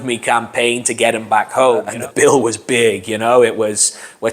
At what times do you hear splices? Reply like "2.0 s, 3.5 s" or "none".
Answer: 1.9 s